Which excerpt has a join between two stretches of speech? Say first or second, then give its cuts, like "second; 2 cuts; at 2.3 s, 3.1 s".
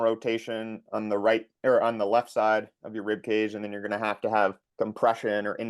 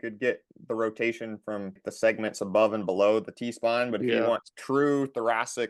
second; 1 cut; at 1.8 s